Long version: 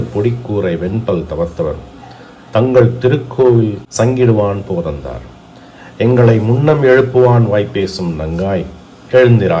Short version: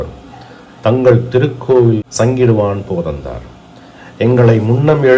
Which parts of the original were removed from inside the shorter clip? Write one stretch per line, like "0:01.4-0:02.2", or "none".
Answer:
0:03.8-0:03.9